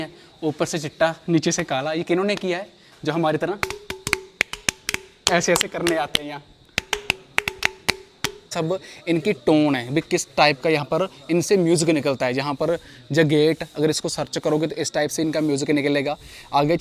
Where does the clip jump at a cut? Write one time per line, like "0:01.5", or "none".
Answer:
0:08.5

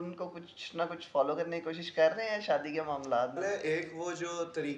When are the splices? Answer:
0:03.4

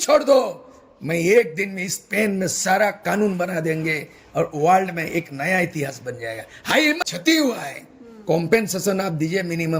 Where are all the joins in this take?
0:07.0

